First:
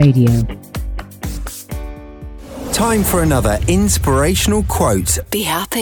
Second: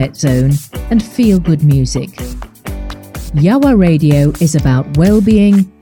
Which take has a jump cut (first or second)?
first